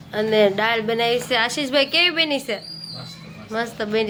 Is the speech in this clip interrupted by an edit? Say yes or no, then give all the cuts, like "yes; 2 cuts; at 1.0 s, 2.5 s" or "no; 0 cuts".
no; 0 cuts